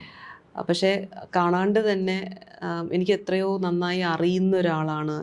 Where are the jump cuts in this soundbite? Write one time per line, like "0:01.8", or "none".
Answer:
none